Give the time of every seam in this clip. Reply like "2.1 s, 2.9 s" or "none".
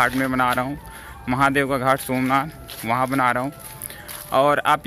none